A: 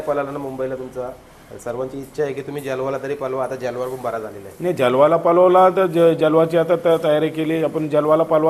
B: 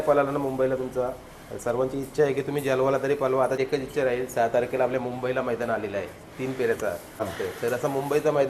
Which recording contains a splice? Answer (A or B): B